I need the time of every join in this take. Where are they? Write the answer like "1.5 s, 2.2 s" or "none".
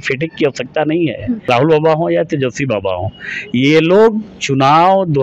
1.5 s